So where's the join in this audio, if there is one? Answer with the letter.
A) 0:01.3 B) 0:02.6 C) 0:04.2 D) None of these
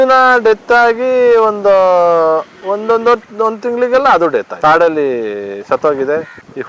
D